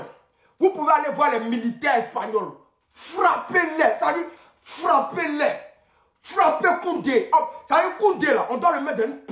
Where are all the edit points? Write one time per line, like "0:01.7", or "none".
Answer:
none